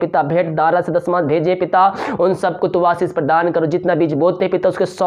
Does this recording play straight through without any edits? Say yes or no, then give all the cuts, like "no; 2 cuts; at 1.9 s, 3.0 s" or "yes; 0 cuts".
yes; 0 cuts